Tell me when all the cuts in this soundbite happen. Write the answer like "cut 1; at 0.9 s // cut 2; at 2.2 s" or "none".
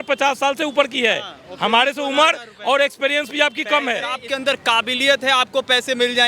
cut 1; at 4.2 s